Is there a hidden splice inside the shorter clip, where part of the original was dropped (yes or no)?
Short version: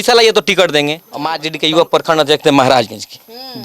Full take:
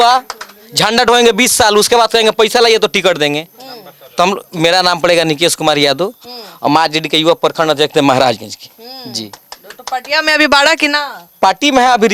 yes